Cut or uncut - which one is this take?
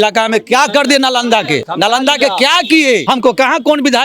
cut